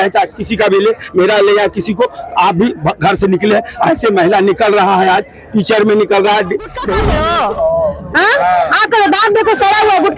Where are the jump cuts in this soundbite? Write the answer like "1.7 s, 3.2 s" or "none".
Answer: 6.9 s